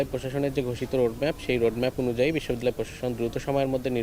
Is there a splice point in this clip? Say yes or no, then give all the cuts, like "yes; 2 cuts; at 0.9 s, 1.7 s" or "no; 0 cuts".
no; 0 cuts